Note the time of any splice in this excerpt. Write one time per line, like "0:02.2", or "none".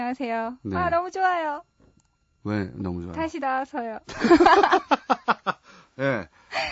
0:04.7